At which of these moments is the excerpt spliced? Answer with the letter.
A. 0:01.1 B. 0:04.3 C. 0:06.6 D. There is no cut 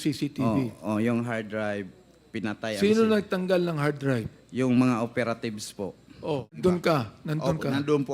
C